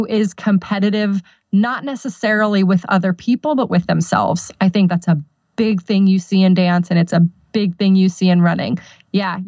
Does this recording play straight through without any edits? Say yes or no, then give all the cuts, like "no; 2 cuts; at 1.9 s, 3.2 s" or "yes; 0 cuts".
yes; 0 cuts